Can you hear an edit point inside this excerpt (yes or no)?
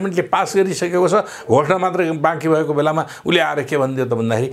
no